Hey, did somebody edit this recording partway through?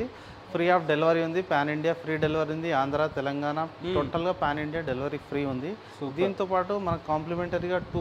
no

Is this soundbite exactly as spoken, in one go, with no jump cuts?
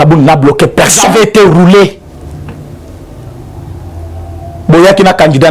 no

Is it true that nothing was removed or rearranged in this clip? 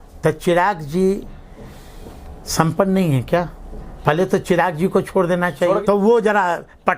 no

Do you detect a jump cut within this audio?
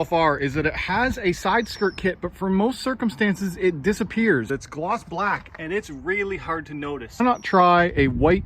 yes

